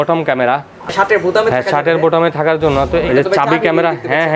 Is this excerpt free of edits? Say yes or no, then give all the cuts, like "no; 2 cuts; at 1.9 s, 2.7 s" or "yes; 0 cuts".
no; 2 cuts; at 0.9 s, 3.0 s